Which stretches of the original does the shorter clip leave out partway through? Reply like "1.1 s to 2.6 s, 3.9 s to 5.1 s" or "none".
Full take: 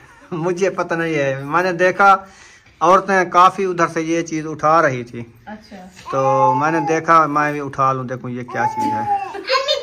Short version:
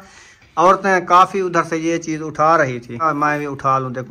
5.3 s to 7.2 s